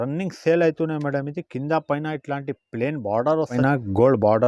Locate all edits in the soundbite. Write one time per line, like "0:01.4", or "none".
0:03.6